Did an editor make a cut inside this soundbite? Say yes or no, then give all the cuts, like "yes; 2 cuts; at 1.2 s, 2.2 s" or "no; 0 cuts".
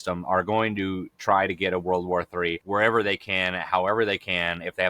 yes; 1 cut; at 2.6 s